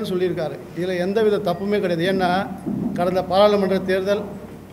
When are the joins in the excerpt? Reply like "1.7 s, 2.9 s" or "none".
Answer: none